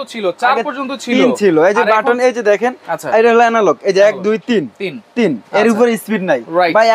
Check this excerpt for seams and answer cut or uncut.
uncut